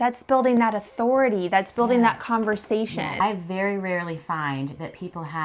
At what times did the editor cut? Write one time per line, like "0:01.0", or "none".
0:03.2